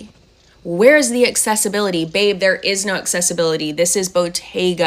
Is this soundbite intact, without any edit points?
yes; 0 cuts

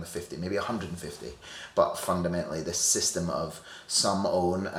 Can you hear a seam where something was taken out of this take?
no; 0 cuts

